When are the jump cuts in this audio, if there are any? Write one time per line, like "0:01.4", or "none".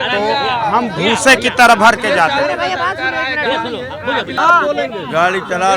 0:04.4